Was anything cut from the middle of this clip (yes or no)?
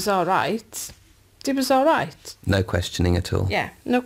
yes